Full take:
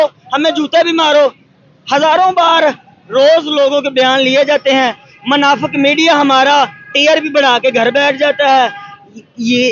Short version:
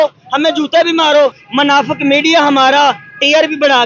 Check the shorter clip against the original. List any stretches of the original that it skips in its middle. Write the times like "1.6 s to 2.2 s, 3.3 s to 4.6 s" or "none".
1.4 s to 5.2 s